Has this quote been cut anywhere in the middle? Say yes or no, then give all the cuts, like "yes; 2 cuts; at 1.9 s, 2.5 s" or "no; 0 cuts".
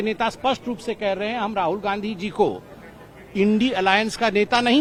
no; 0 cuts